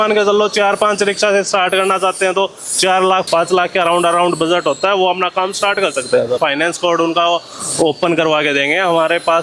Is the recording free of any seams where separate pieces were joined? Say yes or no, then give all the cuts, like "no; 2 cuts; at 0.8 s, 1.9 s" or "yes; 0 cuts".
no; 2 cuts; at 3.2 s, 6.4 s